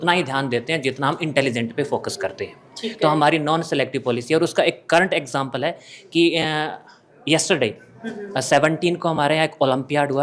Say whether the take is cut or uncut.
uncut